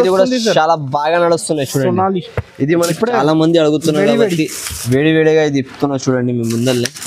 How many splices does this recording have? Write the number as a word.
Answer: one